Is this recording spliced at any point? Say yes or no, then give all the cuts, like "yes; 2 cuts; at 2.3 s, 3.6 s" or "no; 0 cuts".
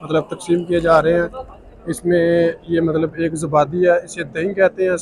no; 0 cuts